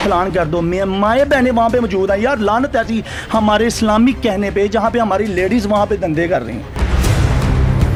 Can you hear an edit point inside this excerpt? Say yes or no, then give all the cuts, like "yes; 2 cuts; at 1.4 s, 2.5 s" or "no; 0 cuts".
no; 0 cuts